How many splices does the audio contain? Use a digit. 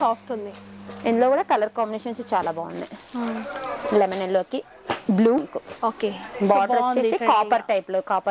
1